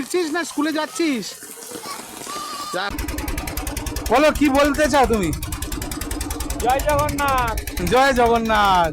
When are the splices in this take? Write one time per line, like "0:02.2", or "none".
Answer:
0:02.9